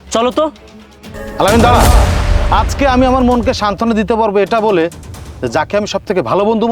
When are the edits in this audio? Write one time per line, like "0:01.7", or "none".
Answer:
0:02.3